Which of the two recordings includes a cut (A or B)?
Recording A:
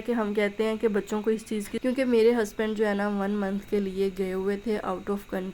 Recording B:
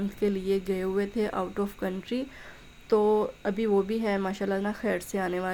A